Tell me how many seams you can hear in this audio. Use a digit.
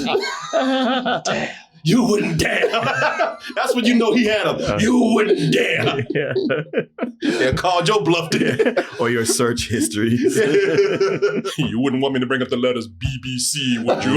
1